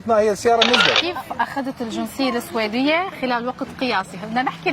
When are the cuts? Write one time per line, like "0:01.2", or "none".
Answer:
0:01.0